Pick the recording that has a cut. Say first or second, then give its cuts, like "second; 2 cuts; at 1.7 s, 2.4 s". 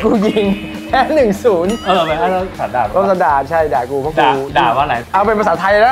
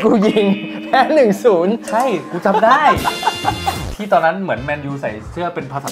first; 2 cuts; at 1.8 s, 5.0 s